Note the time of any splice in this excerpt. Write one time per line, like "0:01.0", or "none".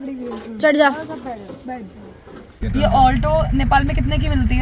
0:02.4